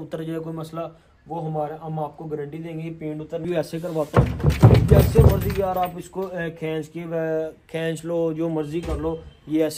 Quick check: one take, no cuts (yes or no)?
no